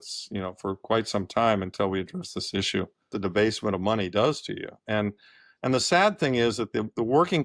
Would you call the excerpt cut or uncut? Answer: cut